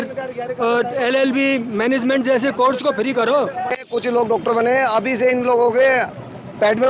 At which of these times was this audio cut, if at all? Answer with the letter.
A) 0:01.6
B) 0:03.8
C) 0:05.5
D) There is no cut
B